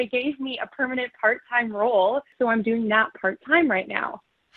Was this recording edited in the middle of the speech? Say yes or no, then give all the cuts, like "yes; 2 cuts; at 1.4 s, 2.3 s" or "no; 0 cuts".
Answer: yes; 1 cut; at 2.3 s